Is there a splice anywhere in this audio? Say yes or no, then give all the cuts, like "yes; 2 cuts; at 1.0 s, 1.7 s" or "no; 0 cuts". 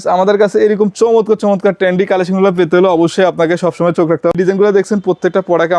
yes; 1 cut; at 4.3 s